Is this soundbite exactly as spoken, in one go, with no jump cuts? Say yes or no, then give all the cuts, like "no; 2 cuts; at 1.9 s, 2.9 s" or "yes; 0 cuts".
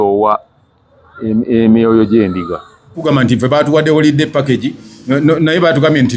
no; 1 cut; at 3.0 s